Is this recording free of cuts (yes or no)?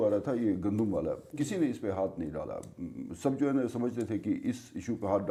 yes